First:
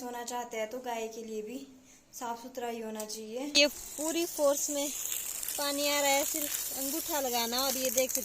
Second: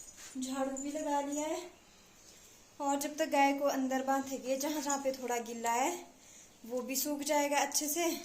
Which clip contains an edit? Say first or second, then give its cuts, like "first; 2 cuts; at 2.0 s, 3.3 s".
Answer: first; 1 cut; at 3.5 s